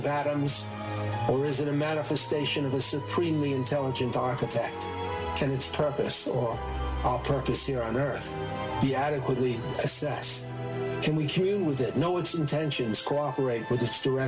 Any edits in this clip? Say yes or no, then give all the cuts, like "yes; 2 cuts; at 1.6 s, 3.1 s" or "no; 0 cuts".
no; 0 cuts